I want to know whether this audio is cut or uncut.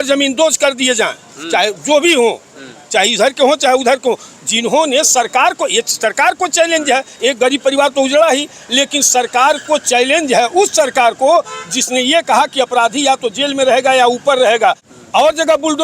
cut